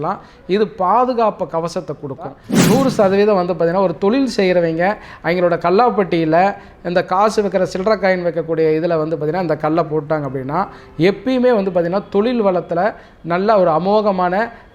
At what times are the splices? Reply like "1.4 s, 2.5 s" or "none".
2.5 s